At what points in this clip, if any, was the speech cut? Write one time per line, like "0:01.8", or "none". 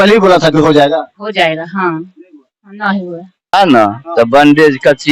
0:03.6